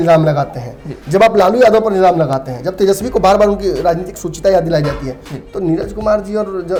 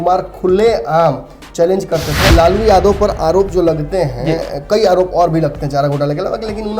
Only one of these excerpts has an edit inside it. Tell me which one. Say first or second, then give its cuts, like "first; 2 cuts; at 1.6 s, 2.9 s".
second; 1 cut; at 2.3 s